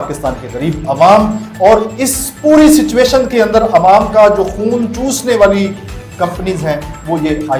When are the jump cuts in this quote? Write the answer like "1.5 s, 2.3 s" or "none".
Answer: none